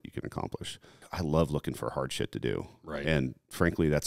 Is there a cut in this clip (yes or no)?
yes